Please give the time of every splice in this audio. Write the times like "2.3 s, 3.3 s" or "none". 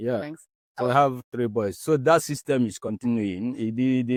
none